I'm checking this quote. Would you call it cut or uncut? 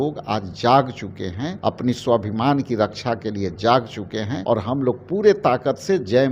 cut